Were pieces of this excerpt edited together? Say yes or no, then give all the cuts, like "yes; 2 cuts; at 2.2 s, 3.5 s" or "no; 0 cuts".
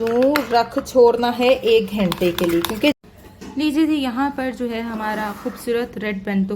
yes; 1 cut; at 3.0 s